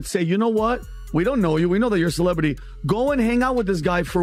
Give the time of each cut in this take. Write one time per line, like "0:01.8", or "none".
none

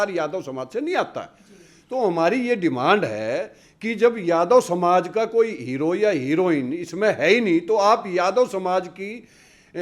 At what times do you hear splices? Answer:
none

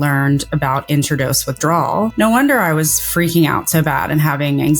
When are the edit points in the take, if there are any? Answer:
0:02.1

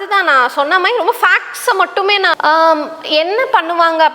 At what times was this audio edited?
0:02.3

